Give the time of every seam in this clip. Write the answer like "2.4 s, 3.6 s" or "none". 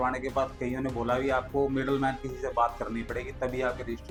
none

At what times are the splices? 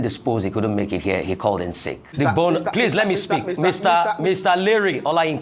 2.1 s

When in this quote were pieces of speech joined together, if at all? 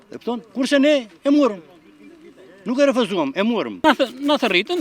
3.8 s

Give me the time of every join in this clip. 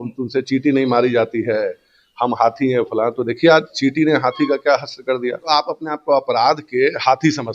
5.4 s

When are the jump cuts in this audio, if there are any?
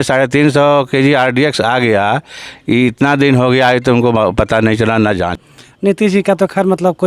5.2 s

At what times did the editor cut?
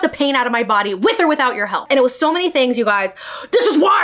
1.8 s

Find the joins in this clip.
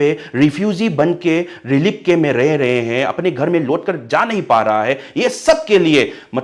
none

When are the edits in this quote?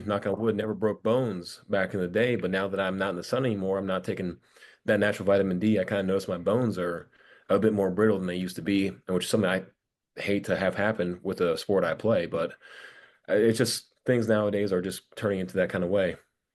none

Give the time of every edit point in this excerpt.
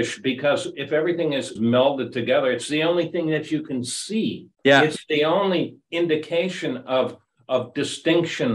1.5 s, 4.5 s

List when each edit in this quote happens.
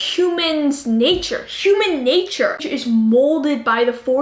2.6 s

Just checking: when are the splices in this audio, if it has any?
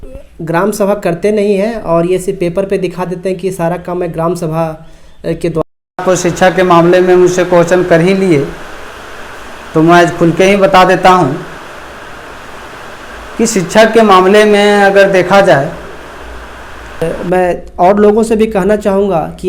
5.6 s, 17.0 s

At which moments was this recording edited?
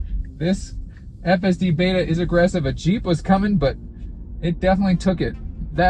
none

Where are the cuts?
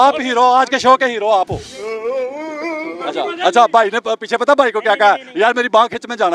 1.7 s, 3.0 s

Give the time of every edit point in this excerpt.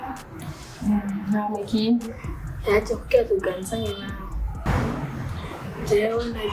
4.5 s

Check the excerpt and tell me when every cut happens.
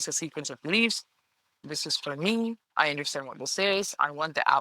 1.6 s

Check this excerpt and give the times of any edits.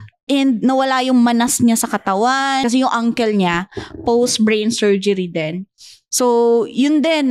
2.6 s

